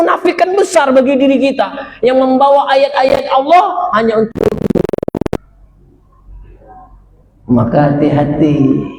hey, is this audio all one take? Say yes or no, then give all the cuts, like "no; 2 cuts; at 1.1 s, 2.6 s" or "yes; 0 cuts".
no; 1 cut; at 5.4 s